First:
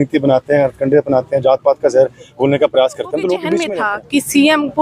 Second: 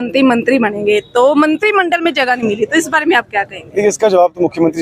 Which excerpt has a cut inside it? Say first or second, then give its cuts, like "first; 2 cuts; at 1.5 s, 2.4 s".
first; 1 cut; at 3.7 s